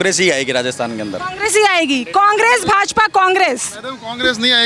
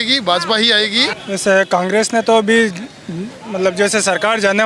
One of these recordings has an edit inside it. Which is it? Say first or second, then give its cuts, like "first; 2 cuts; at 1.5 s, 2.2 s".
second; 1 cut; at 1.2 s